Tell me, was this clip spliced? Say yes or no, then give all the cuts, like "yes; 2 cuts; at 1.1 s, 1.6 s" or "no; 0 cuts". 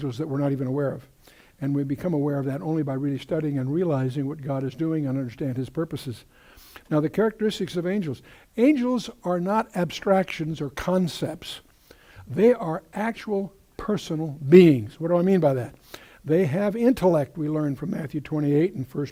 no; 0 cuts